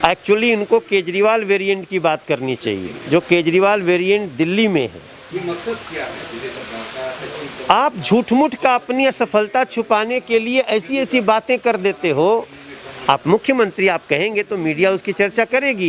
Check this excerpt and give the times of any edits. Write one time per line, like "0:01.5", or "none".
none